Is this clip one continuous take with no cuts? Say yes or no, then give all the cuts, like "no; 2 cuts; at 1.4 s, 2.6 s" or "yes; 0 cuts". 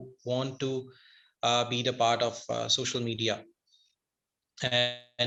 yes; 0 cuts